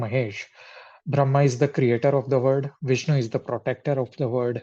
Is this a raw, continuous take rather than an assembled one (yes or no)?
yes